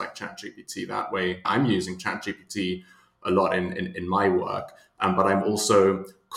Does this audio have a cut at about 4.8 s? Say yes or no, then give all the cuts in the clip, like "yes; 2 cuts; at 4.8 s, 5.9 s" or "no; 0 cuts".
no; 1 cut; at 1.5 s